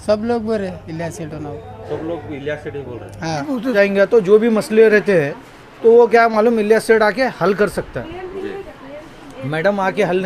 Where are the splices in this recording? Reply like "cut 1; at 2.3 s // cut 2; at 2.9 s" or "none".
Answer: cut 1; at 3.7 s